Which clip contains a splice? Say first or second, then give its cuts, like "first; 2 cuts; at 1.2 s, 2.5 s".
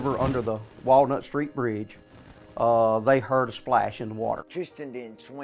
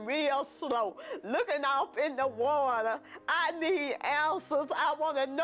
first; 1 cut; at 4.5 s